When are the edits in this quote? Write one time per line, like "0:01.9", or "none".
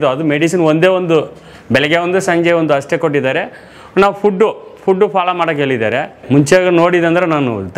none